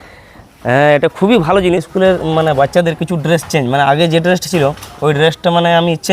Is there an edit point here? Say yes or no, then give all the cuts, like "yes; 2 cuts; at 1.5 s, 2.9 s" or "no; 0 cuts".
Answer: yes; 1 cut; at 1.9 s